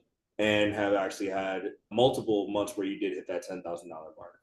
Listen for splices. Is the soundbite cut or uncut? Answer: uncut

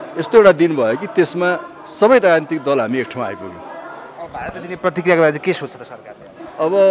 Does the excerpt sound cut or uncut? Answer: uncut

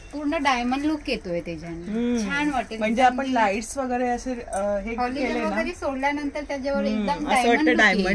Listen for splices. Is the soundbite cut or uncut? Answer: uncut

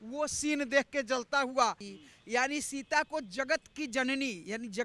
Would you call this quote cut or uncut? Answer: cut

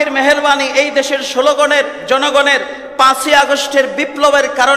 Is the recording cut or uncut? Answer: uncut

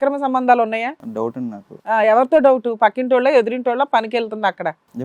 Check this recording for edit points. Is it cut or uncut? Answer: cut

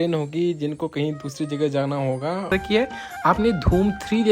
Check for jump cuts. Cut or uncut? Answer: cut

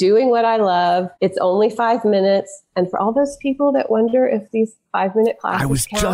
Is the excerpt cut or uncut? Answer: cut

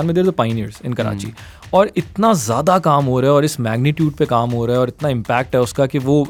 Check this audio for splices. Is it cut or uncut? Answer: uncut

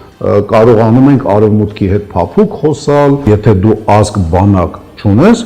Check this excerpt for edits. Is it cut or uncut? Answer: cut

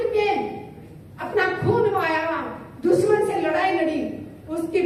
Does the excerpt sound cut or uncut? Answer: uncut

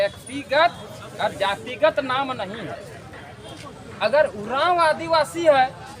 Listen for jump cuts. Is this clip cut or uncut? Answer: cut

